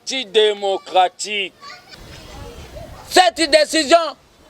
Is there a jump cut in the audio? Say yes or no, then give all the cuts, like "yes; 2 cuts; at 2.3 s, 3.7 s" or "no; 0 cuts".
yes; 1 cut; at 1.9 s